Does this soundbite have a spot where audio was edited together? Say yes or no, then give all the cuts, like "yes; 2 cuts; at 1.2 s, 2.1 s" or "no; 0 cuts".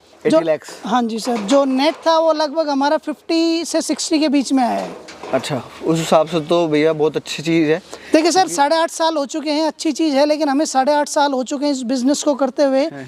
no; 0 cuts